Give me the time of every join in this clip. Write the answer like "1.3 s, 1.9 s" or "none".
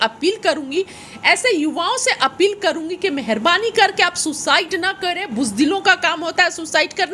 none